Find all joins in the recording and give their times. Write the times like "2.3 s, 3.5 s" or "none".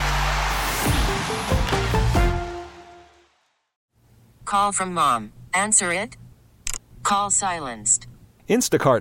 3.8 s